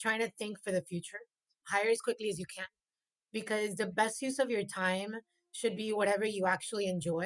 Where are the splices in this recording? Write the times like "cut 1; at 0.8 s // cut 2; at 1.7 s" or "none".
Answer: cut 1; at 1.6 s